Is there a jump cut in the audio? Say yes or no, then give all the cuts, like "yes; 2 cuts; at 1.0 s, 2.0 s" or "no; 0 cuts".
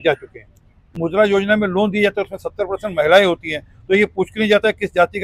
yes; 1 cut; at 1.0 s